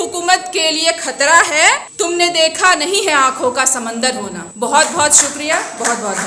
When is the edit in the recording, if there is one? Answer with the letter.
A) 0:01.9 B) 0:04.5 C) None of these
C